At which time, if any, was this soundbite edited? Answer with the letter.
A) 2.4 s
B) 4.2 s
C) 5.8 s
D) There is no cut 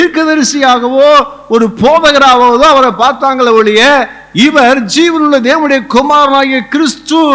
D